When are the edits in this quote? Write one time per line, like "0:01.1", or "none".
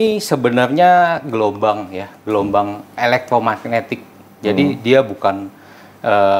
none